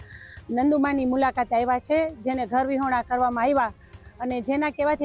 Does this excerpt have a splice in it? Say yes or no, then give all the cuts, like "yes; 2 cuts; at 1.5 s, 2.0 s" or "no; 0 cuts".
no; 0 cuts